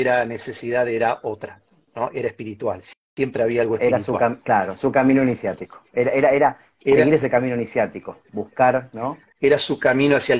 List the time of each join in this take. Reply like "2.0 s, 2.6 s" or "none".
9.2 s

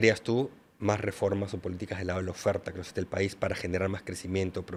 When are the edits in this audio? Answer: none

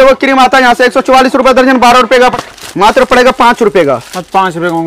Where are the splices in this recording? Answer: 2.4 s

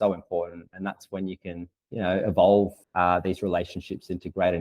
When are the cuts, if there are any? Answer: 1.7 s, 2.8 s

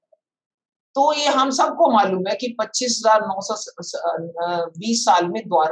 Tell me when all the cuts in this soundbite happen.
none

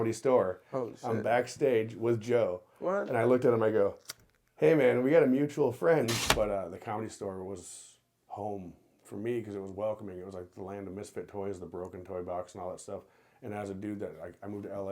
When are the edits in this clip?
6.2 s

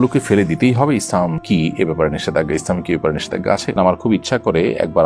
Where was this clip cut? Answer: 3.8 s

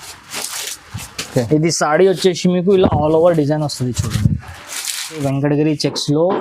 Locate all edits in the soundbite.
5.2 s

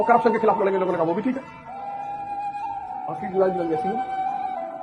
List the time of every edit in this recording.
none

